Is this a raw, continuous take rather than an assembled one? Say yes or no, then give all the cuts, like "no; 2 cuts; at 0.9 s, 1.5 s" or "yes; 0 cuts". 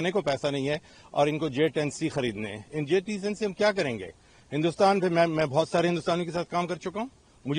yes; 0 cuts